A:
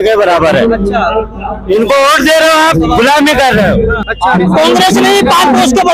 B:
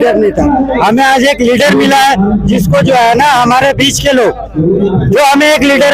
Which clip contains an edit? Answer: A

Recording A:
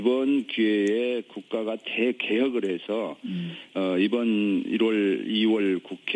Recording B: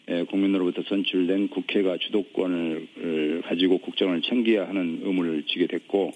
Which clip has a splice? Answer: B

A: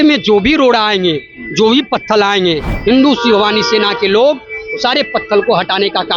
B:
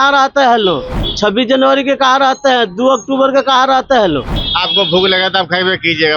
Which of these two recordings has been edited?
B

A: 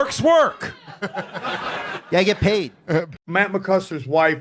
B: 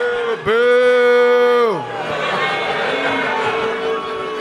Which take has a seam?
A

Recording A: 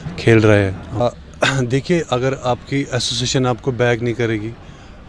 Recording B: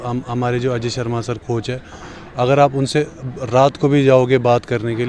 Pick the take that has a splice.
A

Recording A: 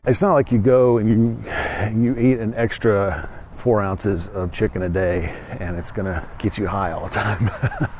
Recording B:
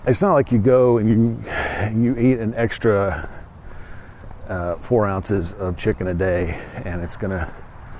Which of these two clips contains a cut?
A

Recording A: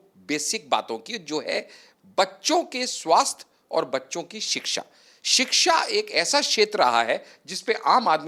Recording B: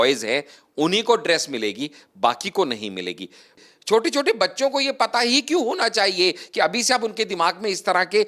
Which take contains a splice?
B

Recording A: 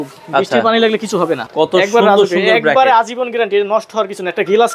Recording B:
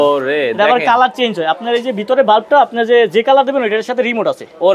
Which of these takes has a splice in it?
A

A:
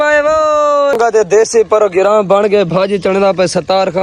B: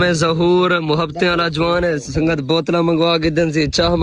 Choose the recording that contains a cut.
A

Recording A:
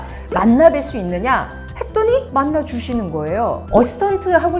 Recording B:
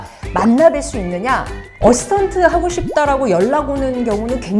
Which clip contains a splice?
B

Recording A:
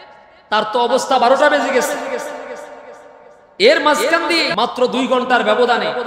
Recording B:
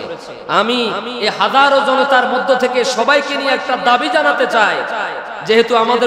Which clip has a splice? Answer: A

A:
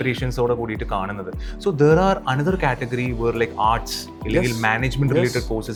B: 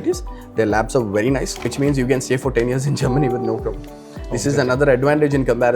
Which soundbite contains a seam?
B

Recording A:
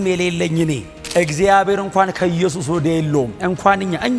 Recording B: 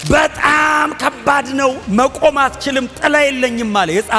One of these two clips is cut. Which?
A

